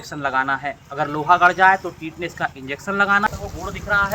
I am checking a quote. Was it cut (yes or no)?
yes